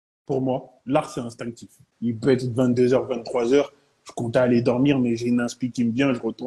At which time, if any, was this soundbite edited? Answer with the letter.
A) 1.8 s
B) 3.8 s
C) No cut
A